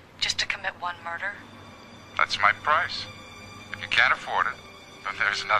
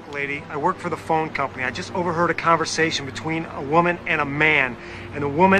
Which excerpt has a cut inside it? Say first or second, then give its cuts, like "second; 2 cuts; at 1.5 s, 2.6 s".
second; 1 cut; at 3.1 s